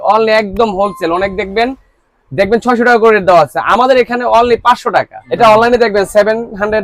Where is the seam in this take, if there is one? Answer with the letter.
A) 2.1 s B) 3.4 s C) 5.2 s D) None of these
C